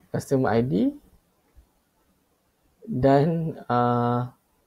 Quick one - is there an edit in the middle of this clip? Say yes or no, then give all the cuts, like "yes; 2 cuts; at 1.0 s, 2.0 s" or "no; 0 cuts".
no; 0 cuts